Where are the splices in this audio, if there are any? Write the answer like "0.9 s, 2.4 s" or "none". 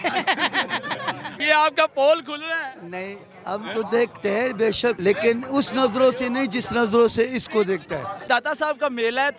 1.3 s, 5.0 s, 8.2 s